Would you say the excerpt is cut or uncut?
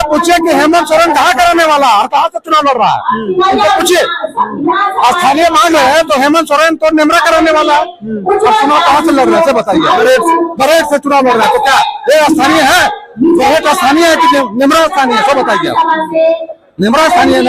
uncut